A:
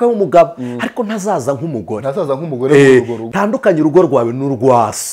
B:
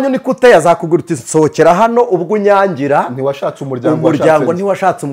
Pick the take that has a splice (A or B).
A